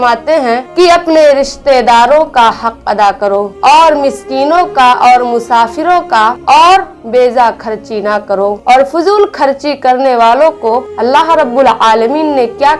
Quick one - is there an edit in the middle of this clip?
no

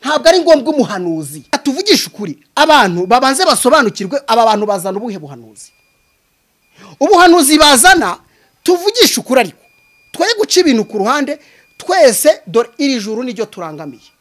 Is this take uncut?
no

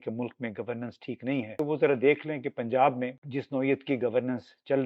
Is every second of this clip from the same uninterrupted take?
no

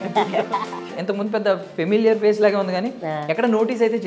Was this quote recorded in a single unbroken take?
no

